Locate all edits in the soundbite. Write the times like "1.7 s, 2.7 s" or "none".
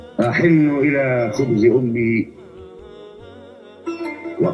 none